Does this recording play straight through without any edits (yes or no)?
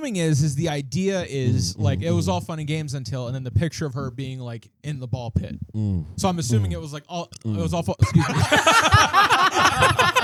yes